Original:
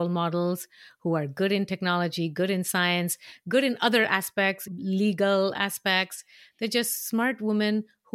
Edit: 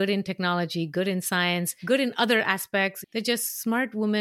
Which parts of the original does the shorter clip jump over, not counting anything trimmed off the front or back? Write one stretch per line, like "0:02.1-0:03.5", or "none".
0:03.2-0:03.4
0:04.7-0:06.5